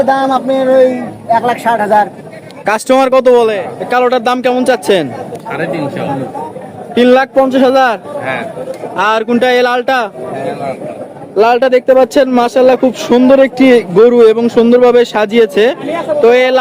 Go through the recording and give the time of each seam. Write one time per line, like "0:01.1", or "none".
0:03.7